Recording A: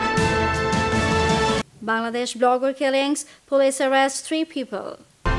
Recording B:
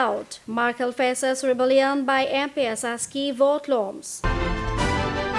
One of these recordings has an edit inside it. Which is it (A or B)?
A